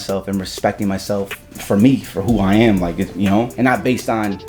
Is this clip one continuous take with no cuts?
no; 1 cut; at 3.5 s

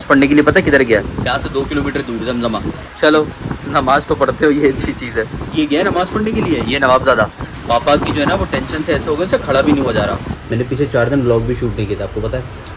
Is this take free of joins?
no; 5 cuts; at 1.2 s, 2.8 s, 5.5 s, 7.5 s, 10.3 s

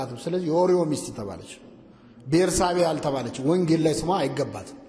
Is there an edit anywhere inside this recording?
no; 0 cuts

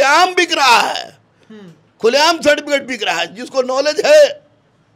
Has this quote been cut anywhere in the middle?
no; 0 cuts

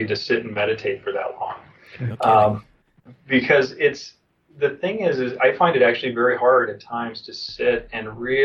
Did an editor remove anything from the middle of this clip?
no; 0 cuts

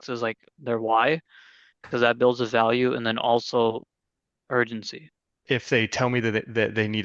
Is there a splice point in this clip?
yes; 1 cut; at 5.3 s

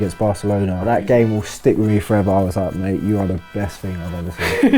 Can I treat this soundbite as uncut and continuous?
no; 1 cut; at 1.0 s

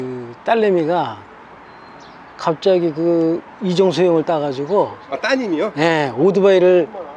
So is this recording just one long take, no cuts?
yes; 0 cuts

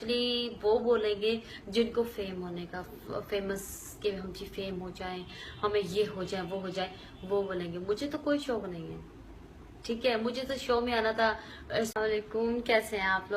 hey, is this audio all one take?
yes; 0 cuts

